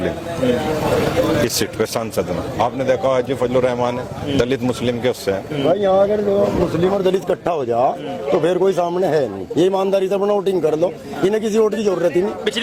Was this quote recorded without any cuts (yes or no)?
yes